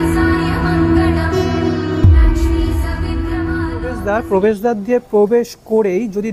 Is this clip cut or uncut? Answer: cut